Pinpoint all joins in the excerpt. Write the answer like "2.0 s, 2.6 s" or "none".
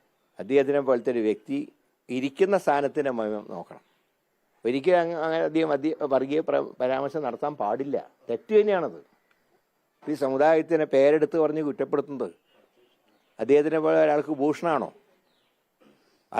none